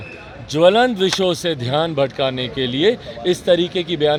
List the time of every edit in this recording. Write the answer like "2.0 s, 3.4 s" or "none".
none